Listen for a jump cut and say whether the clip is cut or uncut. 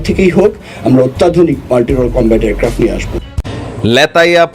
cut